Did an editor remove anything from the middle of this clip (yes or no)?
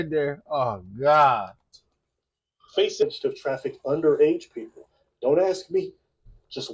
yes